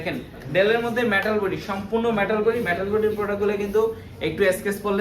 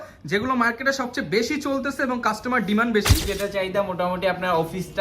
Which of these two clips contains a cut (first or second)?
second